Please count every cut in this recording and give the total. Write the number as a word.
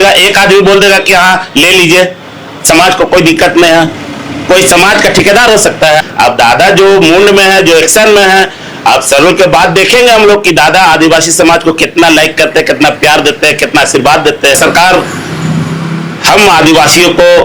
two